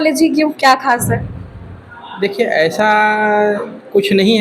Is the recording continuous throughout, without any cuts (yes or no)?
yes